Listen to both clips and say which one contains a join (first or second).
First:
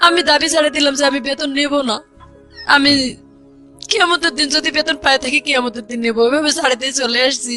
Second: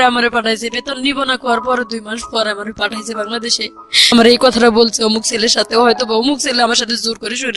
second